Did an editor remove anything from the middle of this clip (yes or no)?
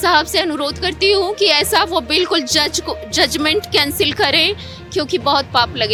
no